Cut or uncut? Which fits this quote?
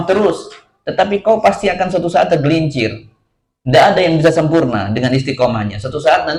uncut